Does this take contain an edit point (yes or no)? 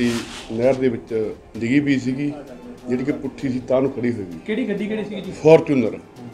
yes